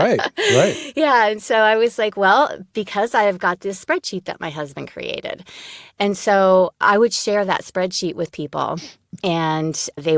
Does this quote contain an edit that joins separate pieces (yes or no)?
no